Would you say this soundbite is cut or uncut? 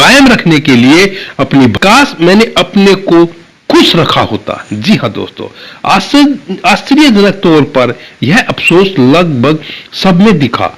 cut